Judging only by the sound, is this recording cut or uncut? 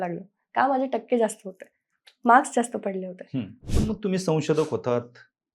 cut